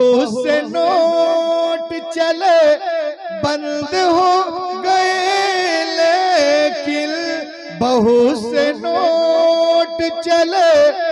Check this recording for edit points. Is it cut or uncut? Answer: uncut